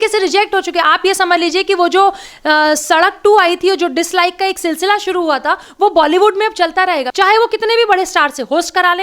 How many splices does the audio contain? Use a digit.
1